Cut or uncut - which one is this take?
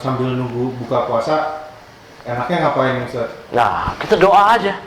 uncut